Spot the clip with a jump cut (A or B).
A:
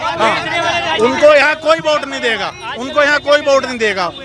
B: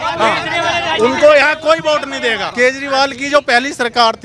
B